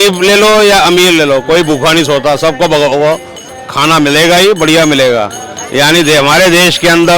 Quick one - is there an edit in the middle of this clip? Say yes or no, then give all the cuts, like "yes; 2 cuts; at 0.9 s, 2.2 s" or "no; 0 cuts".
no; 0 cuts